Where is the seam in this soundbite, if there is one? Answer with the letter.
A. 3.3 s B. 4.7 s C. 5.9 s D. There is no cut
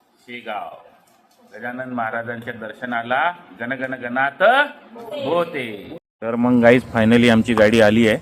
C